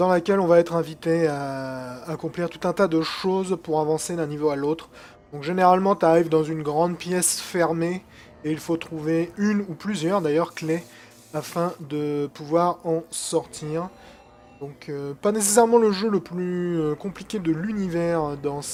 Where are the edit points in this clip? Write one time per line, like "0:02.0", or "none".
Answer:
none